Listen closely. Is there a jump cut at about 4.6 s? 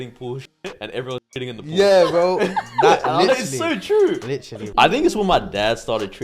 yes; 1 cut; at 4.6 s

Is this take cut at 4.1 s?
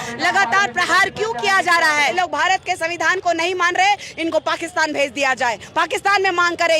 no; 1 cut; at 2.1 s

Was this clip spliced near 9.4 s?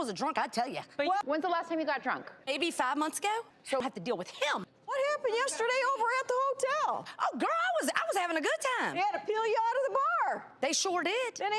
no; 2 cuts; at 1.2 s, 3.8 s

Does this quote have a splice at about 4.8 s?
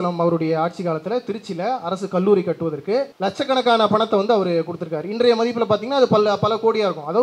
no; 1 cut; at 3.1 s

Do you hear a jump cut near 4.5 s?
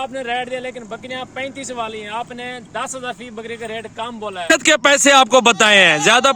yes; 1 cut; at 4.5 s

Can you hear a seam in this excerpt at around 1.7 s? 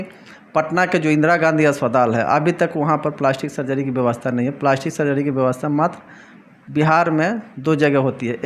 no; 0 cuts

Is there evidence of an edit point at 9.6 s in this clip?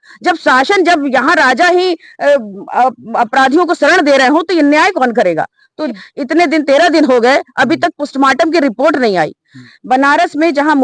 yes; 2 cuts; at 6.0 s, 9.6 s

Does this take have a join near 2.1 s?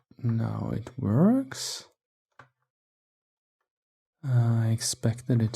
yes; 1 cut; at 2.1 s

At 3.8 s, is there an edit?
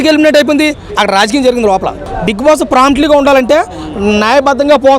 no; 1 cut; at 2.1 s

